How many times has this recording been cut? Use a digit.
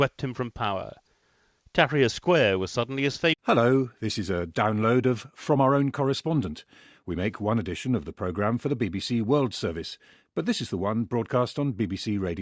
0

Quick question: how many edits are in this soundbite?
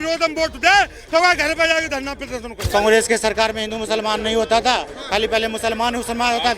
1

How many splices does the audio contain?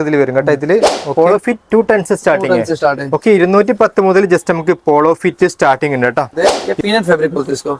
2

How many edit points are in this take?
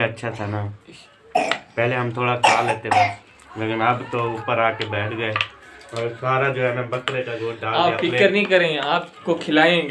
0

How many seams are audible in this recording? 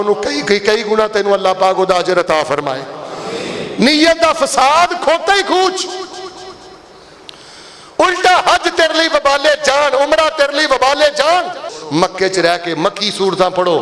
1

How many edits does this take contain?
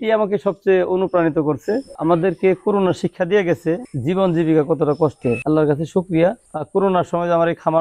4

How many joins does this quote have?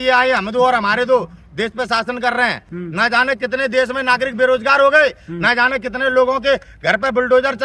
1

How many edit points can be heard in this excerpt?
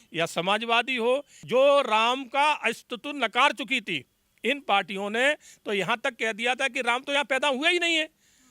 1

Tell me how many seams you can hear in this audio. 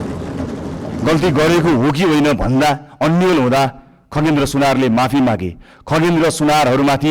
1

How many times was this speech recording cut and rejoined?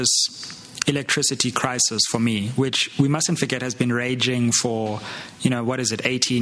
0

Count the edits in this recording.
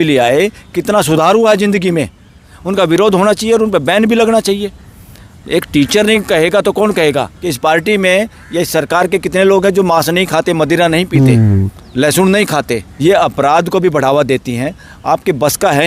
3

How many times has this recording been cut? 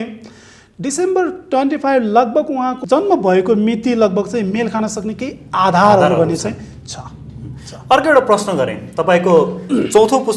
0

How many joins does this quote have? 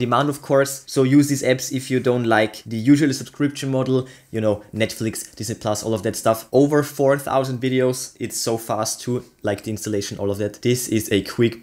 0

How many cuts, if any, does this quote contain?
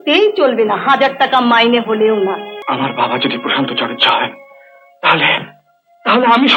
1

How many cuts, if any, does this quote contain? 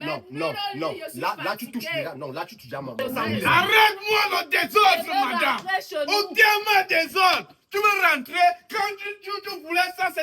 1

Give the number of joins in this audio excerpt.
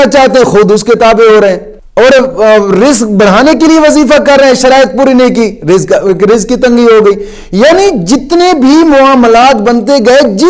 1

